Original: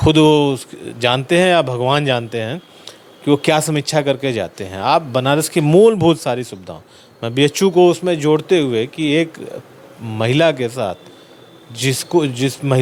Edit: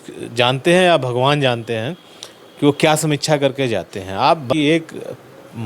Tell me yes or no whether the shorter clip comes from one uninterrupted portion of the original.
no